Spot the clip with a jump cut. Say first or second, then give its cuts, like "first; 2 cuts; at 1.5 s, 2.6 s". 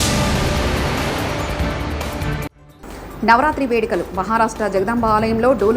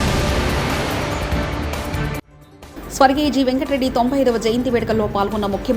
first; 1 cut; at 2.6 s